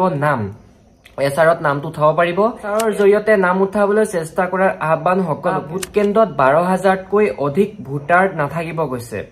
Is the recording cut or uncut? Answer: cut